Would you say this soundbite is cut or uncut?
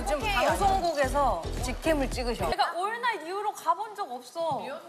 cut